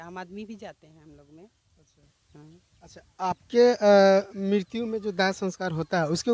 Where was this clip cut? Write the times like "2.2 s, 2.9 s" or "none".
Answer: none

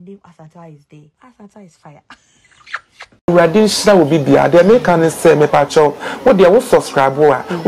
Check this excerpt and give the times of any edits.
1.1 s, 3.2 s

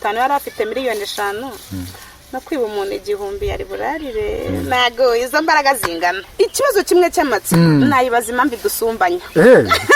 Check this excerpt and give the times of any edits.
6.2 s

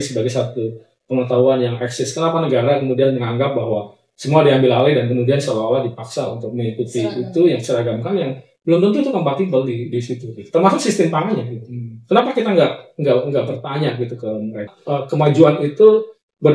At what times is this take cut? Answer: 14.7 s

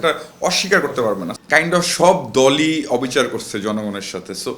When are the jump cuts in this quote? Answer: 1.4 s

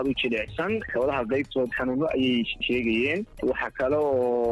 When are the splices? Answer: 2.6 s, 3.3 s

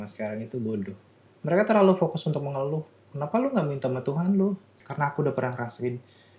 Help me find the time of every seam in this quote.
1.3 s, 3.0 s, 4.8 s

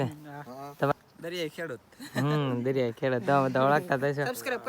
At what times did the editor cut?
0.9 s

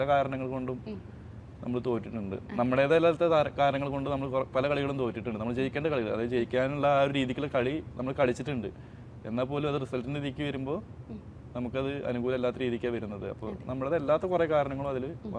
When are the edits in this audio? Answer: none

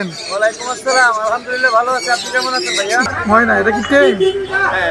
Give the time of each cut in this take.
3.1 s

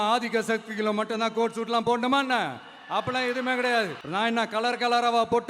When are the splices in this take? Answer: 4.0 s

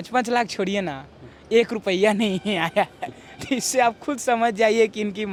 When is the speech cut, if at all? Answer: none

